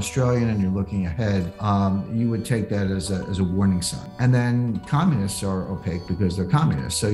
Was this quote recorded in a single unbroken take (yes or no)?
no